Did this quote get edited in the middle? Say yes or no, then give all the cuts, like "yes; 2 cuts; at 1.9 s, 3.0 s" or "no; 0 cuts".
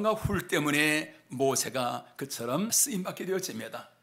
yes; 1 cut; at 2.8 s